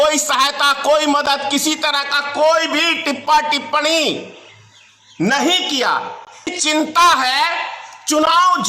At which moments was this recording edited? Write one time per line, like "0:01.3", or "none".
0:06.5